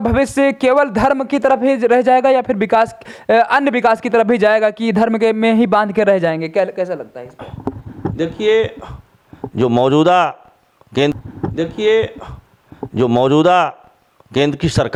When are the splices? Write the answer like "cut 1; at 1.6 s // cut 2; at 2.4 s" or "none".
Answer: none